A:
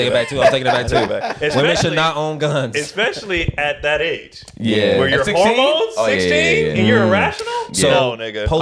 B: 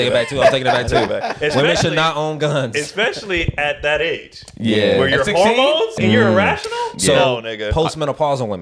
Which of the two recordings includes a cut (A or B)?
B